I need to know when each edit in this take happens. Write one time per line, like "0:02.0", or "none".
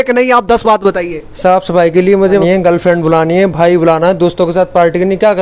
0:02.4